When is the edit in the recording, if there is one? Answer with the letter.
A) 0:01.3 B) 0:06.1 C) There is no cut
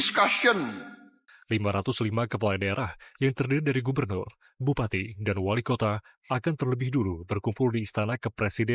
A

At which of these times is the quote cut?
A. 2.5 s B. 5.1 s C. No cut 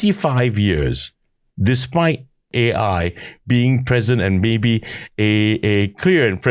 A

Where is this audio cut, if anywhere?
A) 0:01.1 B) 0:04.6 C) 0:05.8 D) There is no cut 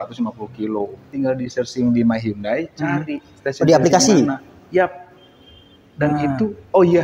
A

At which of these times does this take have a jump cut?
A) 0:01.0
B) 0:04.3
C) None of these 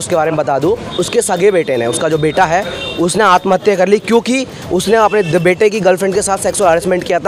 A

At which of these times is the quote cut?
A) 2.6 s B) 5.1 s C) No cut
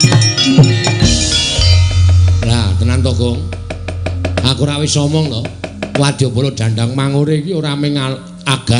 C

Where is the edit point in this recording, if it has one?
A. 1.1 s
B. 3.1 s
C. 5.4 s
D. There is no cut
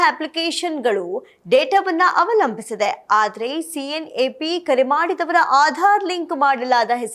D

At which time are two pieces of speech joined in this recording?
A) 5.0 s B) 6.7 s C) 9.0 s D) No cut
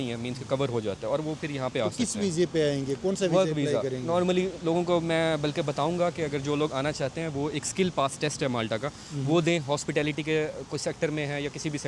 D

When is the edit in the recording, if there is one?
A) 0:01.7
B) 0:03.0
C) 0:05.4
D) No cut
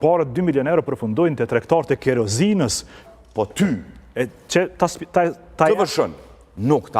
B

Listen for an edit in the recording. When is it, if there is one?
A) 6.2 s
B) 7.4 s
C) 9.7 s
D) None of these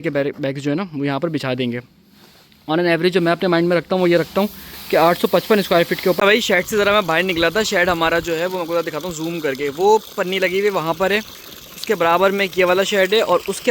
A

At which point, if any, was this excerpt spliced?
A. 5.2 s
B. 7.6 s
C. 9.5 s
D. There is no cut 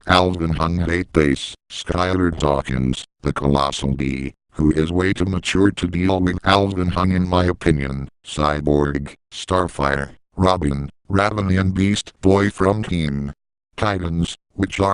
D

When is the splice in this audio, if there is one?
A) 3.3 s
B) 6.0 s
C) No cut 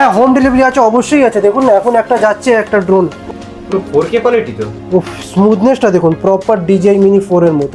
A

